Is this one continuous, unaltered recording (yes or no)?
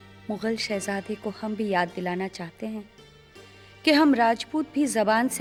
yes